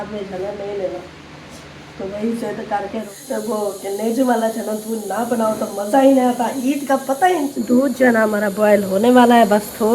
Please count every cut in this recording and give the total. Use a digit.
2